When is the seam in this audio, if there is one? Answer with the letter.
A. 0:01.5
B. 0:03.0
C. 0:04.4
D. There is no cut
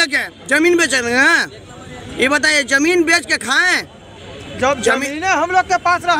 D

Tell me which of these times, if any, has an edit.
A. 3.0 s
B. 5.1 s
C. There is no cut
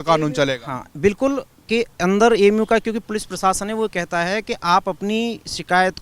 A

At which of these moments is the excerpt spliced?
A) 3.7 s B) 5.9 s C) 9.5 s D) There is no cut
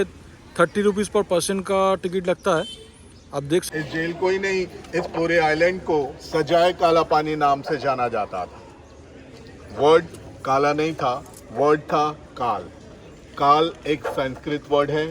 A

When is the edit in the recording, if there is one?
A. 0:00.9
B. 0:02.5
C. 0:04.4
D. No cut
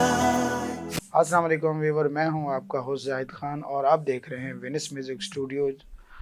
A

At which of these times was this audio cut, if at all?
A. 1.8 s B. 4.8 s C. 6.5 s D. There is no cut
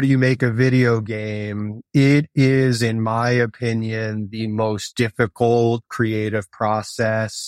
A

